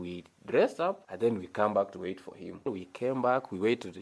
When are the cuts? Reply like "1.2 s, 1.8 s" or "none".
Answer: 1.1 s, 2.8 s